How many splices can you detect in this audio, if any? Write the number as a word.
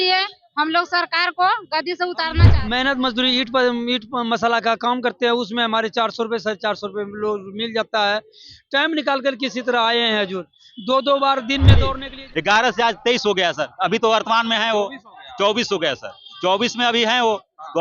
two